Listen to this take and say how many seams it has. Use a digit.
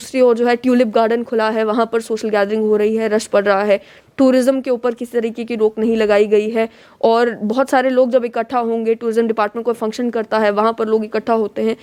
0